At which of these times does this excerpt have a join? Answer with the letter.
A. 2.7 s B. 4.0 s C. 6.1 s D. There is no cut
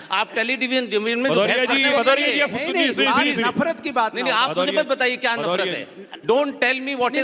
D